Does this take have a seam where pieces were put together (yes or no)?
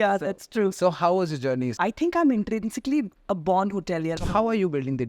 yes